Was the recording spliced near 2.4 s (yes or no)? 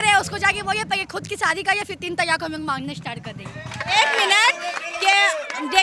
no